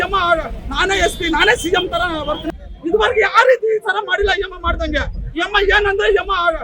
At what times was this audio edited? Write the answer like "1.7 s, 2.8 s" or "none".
2.4 s